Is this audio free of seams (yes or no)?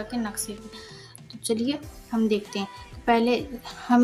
yes